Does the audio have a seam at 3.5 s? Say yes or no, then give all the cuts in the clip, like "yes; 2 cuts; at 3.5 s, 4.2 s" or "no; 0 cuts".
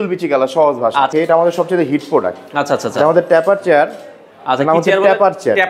no; 1 cut; at 1.1 s